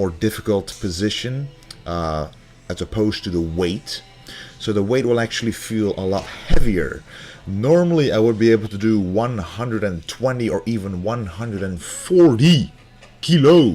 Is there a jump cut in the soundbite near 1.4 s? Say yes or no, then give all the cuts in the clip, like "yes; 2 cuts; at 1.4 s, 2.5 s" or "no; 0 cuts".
no; 1 cut; at 3.0 s